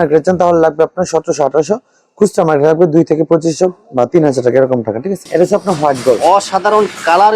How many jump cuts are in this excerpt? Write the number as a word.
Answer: one